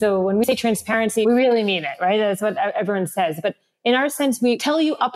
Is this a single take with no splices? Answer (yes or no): no